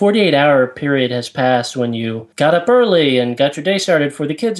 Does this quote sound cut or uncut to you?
cut